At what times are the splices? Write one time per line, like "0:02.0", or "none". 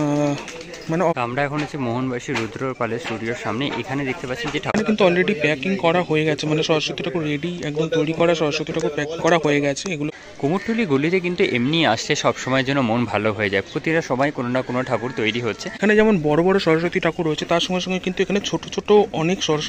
0:01.1
0:04.7
0:10.1
0:15.7